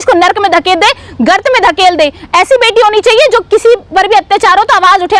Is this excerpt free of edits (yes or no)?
yes